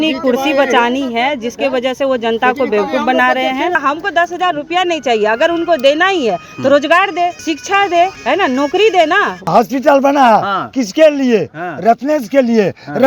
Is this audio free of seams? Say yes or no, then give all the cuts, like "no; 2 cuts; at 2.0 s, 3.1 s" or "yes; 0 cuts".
no; 4 cuts; at 3.8 s, 7.4 s, 8.2 s, 9.5 s